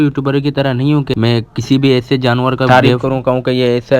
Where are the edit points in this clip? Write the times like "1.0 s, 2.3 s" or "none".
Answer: 1.1 s, 2.5 s